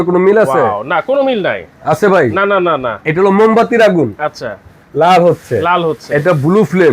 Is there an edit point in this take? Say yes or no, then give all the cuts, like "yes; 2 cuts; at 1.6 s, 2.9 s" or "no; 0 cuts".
no; 0 cuts